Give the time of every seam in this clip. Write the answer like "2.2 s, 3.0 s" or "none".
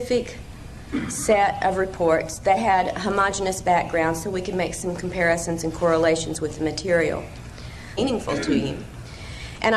none